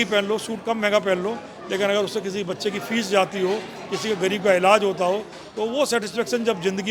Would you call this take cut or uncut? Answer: uncut